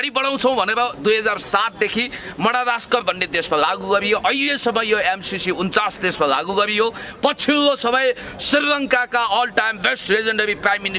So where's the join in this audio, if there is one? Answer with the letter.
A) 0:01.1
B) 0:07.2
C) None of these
C